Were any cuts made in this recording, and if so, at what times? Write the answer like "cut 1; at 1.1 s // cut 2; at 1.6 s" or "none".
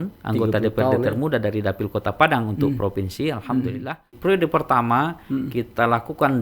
cut 1; at 4.2 s